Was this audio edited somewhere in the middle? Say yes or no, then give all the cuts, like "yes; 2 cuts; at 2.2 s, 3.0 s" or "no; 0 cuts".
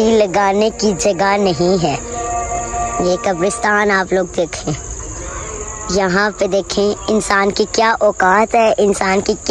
no; 0 cuts